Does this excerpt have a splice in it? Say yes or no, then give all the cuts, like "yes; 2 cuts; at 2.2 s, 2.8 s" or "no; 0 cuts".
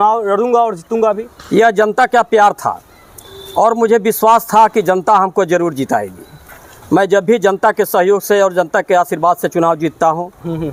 no; 0 cuts